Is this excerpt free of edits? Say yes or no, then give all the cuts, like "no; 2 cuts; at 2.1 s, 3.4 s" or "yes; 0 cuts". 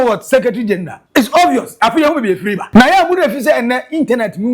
no; 2 cuts; at 1.0 s, 2.6 s